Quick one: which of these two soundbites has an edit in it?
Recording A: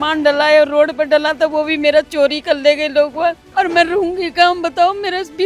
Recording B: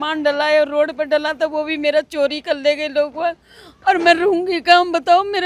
A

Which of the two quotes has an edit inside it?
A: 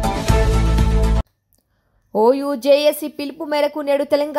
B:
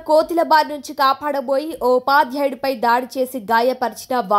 A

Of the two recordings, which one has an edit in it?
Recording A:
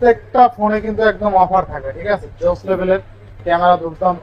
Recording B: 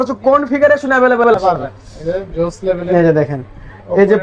B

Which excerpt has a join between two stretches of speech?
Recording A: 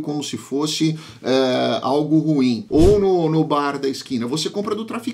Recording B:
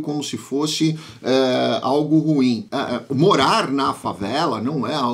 A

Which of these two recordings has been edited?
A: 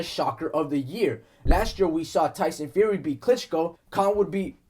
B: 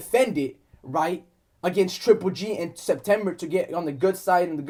A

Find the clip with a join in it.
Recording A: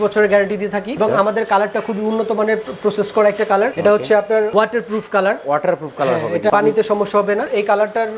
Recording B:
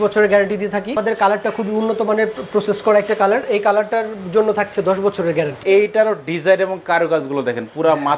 B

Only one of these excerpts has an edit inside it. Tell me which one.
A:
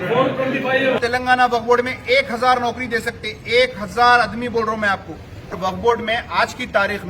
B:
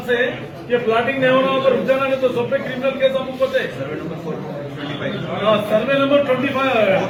A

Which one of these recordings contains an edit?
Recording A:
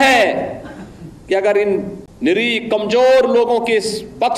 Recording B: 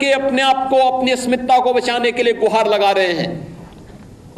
A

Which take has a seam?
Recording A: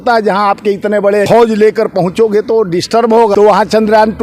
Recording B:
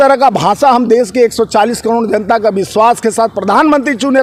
A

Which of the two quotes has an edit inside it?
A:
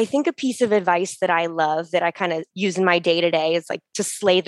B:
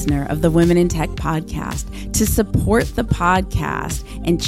A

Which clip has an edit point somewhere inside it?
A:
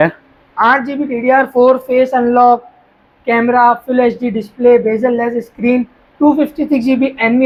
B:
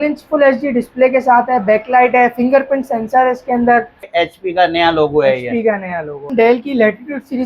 B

